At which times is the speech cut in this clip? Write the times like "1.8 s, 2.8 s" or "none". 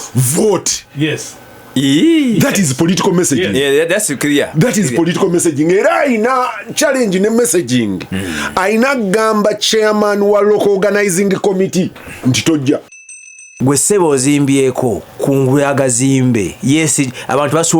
12.9 s, 15.1 s